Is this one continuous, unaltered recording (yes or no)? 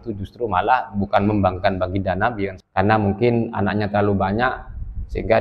no